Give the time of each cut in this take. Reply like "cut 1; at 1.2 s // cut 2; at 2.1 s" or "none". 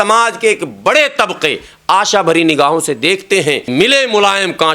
cut 1; at 3.7 s